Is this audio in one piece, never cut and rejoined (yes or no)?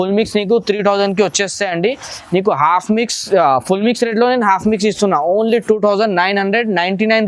yes